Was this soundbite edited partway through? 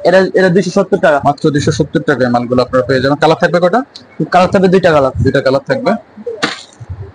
no; 0 cuts

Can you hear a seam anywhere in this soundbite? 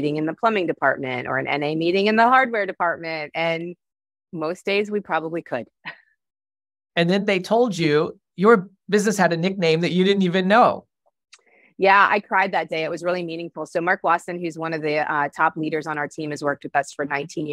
no; 0 cuts

